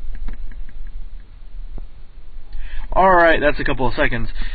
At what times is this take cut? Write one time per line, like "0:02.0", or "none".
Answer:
0:01.5